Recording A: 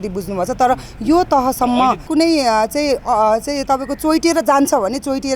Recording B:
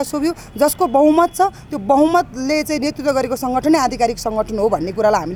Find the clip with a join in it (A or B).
A